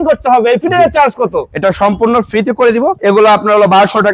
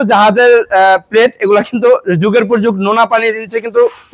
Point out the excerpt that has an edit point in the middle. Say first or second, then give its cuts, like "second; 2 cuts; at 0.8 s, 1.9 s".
first; 1 cut; at 3.0 s